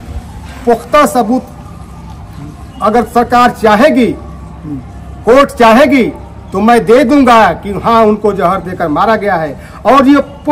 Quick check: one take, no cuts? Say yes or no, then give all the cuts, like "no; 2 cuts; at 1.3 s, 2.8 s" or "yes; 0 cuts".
yes; 0 cuts